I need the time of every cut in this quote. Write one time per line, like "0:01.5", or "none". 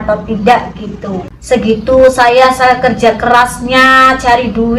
0:01.3